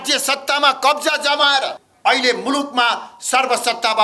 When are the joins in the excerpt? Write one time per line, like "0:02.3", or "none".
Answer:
0:01.8